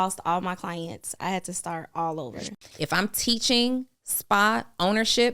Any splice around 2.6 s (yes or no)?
yes